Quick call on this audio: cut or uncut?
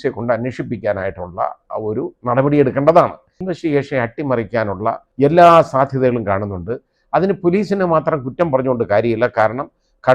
cut